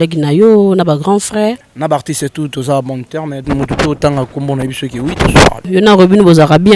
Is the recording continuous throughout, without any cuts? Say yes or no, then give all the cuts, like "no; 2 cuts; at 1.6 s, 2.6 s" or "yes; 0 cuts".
no; 3 cuts; at 1.7 s, 3.4 s, 5.7 s